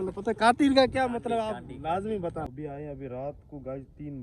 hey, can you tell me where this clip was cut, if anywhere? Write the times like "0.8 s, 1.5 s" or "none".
2.5 s